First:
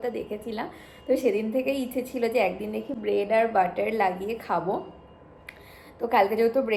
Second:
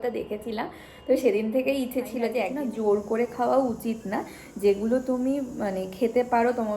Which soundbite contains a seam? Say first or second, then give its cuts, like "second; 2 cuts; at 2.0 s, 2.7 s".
second; 1 cut; at 2.5 s